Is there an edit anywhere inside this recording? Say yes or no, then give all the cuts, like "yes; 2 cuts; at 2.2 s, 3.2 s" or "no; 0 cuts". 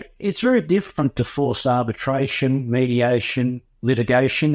no; 0 cuts